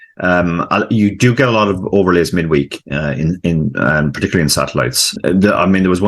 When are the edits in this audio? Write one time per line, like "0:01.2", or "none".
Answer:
0:05.1